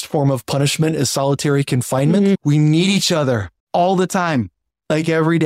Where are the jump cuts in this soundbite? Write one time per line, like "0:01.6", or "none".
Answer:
0:03.5